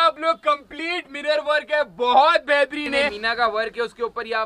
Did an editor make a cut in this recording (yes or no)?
yes